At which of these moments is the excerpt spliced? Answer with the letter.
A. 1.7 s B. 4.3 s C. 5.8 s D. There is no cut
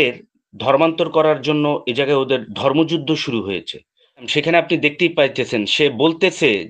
B